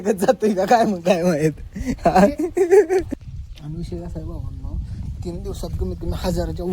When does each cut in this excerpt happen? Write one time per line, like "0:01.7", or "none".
0:03.1